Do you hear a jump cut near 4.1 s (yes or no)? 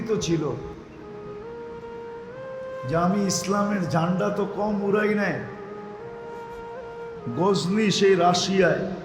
no